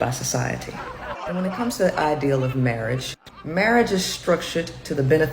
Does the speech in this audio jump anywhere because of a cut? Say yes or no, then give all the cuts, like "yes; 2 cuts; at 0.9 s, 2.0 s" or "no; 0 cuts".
yes; 1 cut; at 1.1 s